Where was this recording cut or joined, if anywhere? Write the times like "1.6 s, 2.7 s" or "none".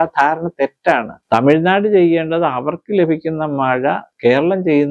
1.1 s